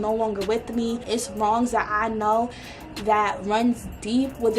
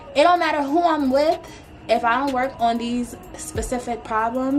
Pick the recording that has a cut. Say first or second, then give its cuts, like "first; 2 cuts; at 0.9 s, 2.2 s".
first; 1 cut; at 1.0 s